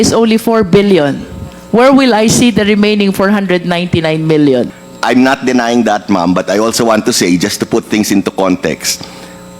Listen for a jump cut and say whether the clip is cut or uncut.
cut